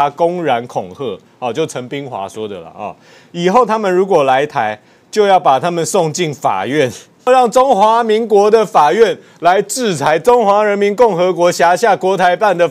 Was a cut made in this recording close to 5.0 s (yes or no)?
no